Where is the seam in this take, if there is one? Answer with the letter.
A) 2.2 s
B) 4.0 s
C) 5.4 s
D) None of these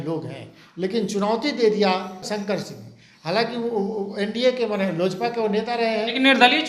A